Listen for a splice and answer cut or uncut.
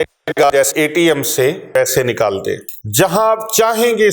cut